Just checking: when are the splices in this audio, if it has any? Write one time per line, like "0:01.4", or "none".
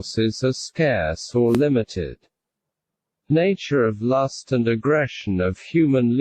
0:01.6